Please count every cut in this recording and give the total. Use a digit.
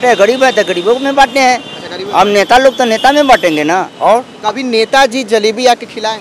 1